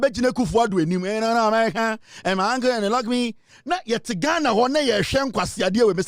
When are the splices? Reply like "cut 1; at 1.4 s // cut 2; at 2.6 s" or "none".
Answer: none